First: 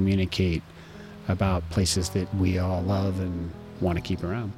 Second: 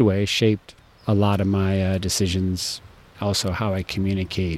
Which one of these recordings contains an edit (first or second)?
first